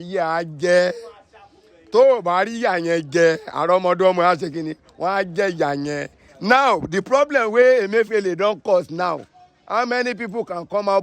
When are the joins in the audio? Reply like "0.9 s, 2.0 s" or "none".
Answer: 6.2 s